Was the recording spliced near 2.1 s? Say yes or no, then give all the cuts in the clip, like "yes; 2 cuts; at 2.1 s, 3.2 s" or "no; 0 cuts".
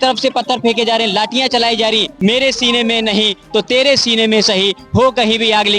yes; 1 cut; at 2.1 s